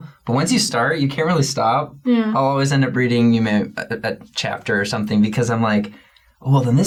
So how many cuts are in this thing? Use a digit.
0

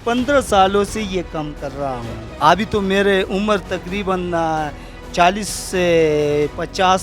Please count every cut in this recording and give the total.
1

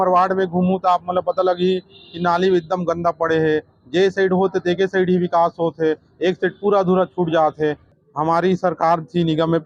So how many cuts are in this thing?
1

